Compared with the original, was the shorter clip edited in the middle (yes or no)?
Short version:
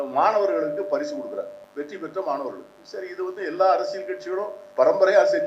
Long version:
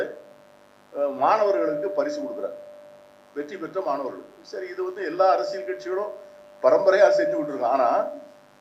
yes